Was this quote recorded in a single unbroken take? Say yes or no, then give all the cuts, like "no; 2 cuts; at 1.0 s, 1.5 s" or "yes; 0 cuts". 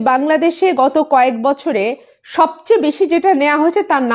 yes; 0 cuts